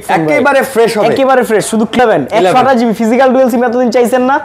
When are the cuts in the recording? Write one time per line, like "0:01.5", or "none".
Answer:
0:02.0